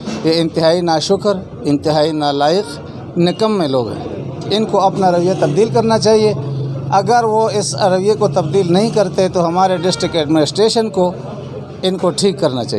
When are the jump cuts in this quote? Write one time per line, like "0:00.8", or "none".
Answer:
none